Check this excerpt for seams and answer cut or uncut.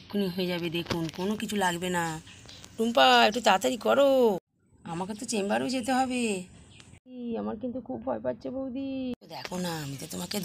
uncut